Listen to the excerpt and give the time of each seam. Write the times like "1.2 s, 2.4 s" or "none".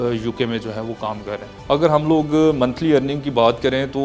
1.5 s